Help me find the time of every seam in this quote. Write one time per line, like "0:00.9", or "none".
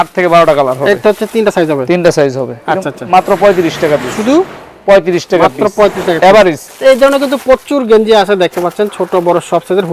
0:06.7